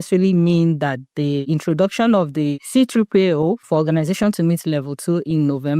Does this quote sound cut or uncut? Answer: cut